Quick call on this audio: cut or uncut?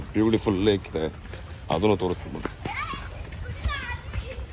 uncut